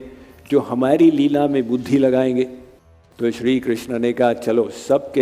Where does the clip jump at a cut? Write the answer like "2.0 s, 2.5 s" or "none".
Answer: 3.0 s